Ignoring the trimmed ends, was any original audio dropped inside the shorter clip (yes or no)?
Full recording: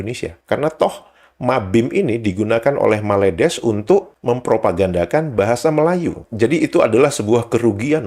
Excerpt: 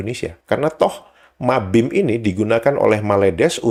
no